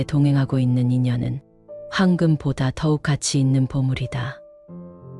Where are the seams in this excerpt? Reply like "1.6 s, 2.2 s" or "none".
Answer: none